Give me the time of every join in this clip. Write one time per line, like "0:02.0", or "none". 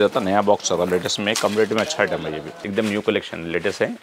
0:02.5